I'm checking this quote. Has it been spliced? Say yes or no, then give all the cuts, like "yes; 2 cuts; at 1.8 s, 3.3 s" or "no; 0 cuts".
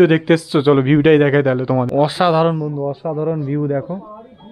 yes; 1 cut; at 1.9 s